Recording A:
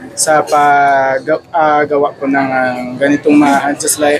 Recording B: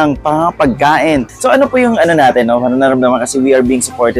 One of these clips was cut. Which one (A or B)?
B